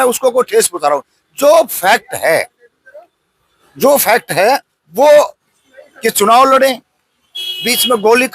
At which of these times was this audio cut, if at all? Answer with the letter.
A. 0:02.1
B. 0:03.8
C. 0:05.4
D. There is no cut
C